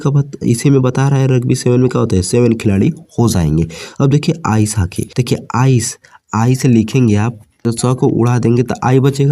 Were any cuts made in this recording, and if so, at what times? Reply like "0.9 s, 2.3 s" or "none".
5.1 s, 7.6 s